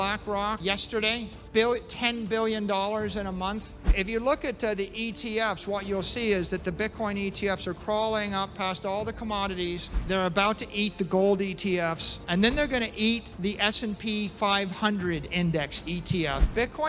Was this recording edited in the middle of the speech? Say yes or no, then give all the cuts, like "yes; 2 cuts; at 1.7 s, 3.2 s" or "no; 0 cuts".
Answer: no; 0 cuts